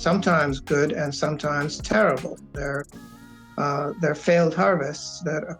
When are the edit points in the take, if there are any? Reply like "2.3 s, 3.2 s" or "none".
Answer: none

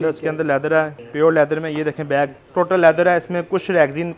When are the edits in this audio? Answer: 1.0 s, 2.4 s

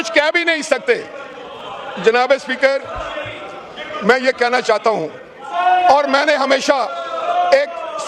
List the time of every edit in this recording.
none

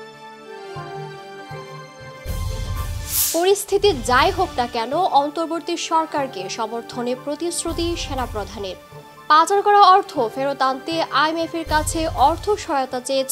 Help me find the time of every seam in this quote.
3.2 s

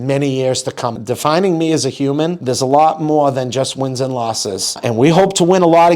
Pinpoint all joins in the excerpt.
0.9 s

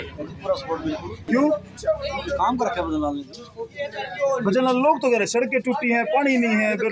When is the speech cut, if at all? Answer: 1.2 s

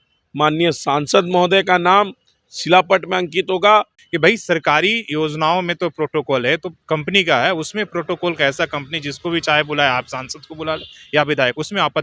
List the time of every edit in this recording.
4.0 s, 6.7 s

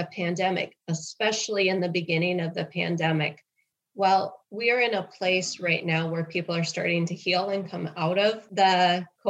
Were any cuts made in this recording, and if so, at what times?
4.4 s, 8.4 s

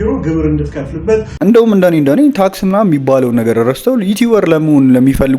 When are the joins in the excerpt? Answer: 1.3 s

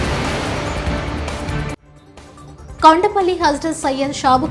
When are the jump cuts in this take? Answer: 2.5 s

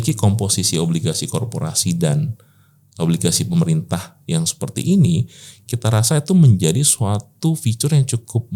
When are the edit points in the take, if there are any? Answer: none

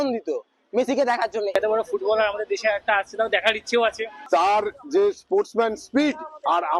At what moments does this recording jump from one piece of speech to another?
1.5 s, 4.1 s

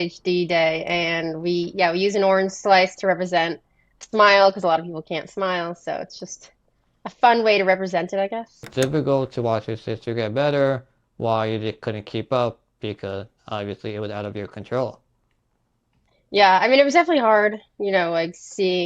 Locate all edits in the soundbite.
8.7 s

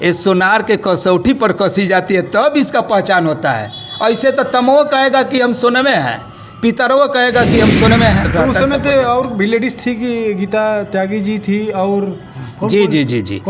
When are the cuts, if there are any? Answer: 8.3 s

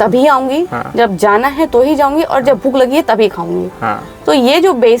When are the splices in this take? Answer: none

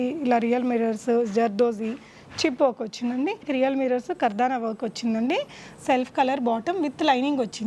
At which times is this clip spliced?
3.5 s

